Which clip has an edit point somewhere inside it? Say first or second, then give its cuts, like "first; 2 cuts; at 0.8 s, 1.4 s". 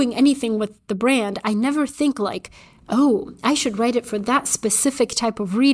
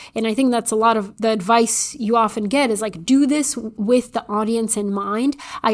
second; 2 cuts; at 1.1 s, 3.6 s